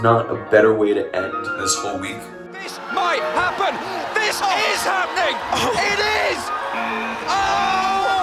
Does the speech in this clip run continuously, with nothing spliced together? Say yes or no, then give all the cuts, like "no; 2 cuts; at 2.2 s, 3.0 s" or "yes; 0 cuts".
no; 1 cut; at 2.6 s